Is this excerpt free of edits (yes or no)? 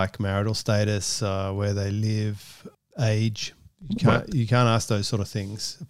yes